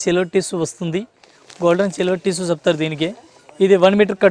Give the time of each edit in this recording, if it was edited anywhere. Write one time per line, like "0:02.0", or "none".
none

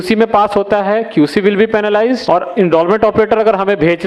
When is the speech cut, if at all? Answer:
0:02.2

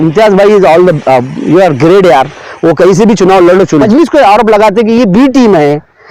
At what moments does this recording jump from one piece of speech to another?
0:03.9

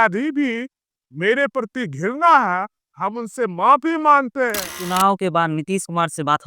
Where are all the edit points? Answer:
0:04.8

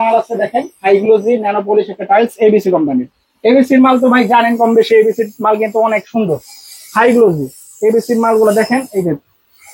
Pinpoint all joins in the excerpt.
none

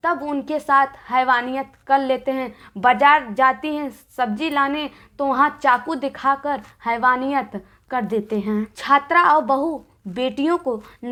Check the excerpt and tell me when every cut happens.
none

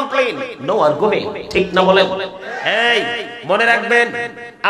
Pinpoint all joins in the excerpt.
0:02.5

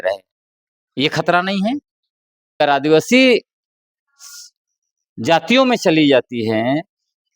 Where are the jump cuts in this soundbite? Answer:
0:02.6

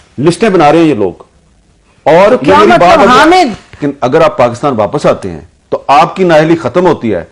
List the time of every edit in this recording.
0:03.7

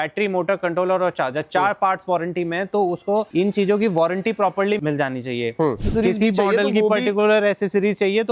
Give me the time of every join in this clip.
0:03.3
0:04.8
0:05.8

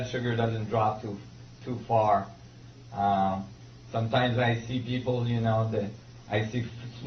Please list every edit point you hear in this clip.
none

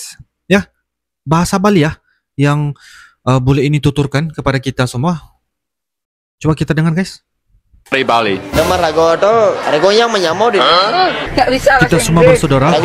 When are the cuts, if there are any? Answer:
none

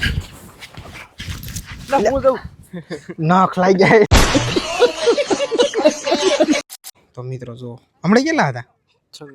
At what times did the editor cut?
0:04.1
0:06.5

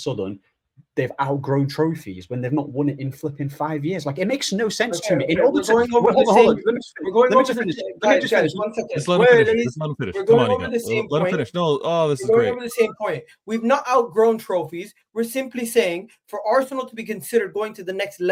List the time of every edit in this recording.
none

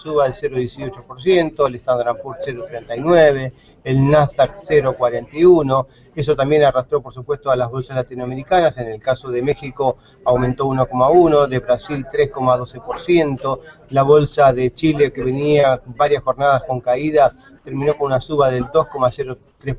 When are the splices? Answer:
0:14.9

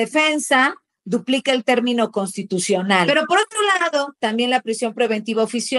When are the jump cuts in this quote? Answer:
0:03.1

